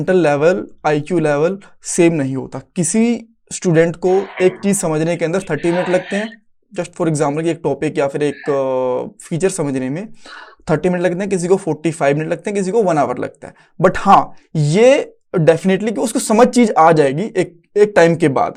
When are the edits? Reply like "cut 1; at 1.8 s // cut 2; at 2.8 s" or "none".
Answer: none